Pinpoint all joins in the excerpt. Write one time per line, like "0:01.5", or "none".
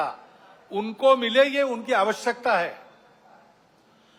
none